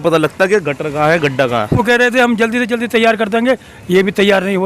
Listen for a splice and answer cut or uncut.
cut